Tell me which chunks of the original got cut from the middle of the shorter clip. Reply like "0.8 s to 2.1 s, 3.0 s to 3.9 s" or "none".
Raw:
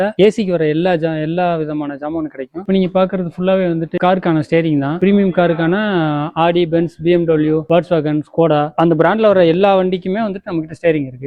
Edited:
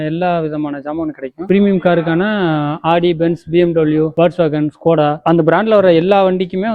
2.6 s to 4.9 s